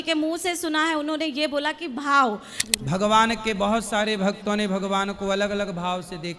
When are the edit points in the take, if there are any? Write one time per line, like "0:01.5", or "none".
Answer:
0:02.5